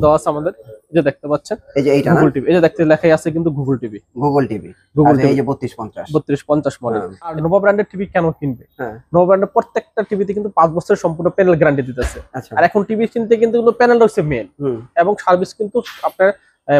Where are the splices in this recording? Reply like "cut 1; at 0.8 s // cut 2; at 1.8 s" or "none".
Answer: cut 1; at 7.4 s